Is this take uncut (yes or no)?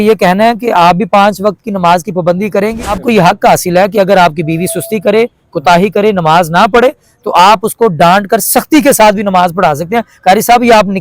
no